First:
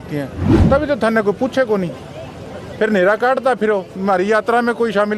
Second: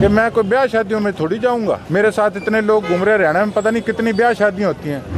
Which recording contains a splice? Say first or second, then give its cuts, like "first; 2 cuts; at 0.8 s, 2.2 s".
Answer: second; 1 cut; at 1.8 s